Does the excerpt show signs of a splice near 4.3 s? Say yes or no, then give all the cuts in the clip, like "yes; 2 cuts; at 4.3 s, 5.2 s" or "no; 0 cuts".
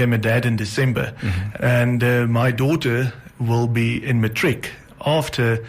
no; 1 cut; at 1.4 s